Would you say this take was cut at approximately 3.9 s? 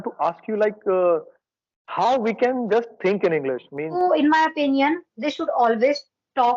yes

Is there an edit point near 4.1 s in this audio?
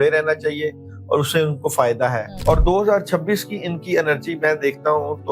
no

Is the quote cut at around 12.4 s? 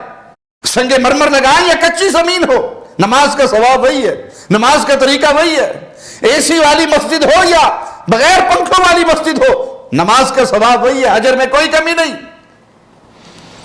no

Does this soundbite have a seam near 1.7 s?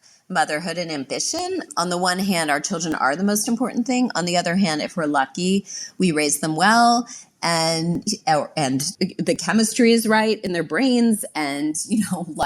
yes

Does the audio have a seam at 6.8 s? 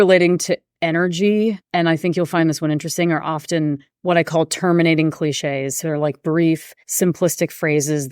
yes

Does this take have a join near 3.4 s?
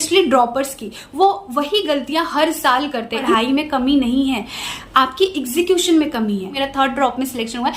yes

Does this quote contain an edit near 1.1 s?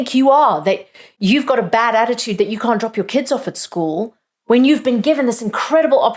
yes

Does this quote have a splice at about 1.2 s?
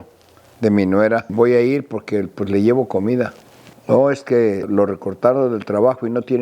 yes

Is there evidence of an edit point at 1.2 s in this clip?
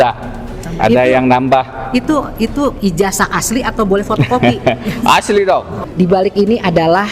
no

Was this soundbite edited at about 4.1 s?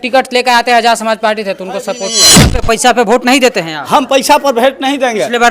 no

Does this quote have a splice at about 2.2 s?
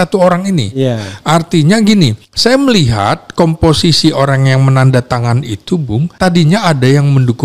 yes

